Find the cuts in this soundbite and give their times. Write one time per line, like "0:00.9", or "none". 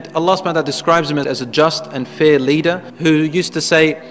0:01.3